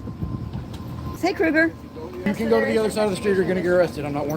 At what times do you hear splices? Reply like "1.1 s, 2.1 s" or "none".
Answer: 1.2 s, 2.2 s